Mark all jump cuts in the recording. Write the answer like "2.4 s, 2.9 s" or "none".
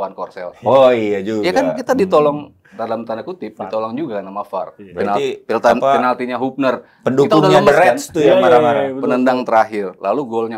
none